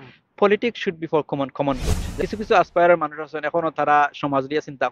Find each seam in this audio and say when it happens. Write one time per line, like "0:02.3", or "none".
0:02.2